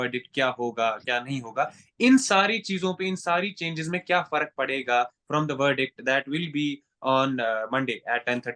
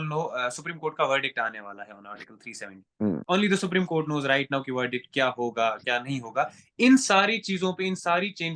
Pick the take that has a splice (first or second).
second